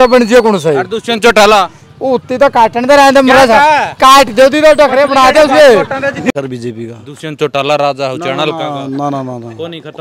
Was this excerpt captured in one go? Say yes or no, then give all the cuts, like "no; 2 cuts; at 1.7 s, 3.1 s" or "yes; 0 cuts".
no; 1 cut; at 6.3 s